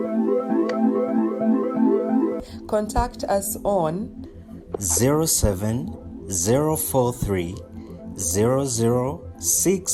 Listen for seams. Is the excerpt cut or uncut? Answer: cut